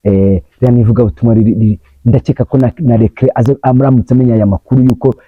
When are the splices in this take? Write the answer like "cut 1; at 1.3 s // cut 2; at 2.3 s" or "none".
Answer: none